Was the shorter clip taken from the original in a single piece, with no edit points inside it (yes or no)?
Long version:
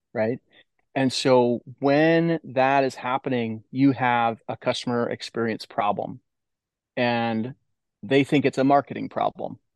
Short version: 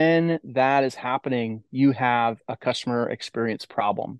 yes